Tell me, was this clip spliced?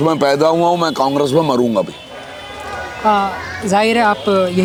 no; 0 cuts

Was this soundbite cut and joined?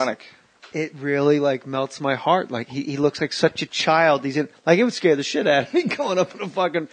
no; 0 cuts

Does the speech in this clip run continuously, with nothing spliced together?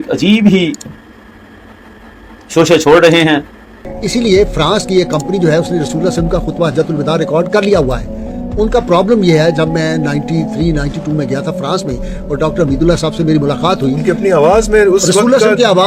yes; 0 cuts

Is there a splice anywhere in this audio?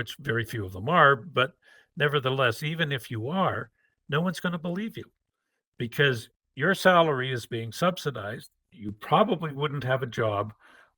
yes; 1 cut; at 8.9 s

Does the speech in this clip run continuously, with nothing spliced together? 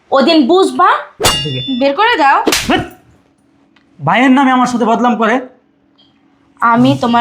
no; 1 cut; at 1.3 s

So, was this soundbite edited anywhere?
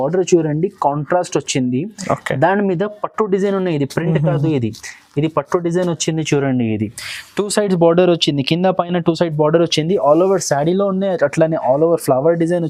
no; 0 cuts

